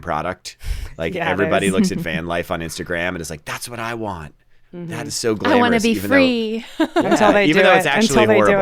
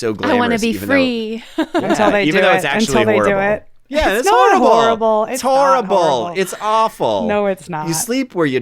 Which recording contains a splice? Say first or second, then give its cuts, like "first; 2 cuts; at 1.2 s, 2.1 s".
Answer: second; 1 cut; at 7.7 s